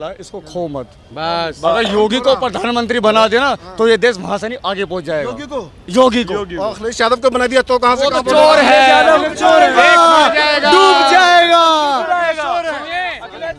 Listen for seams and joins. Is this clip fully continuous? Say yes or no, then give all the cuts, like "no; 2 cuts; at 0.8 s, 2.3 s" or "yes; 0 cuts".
yes; 0 cuts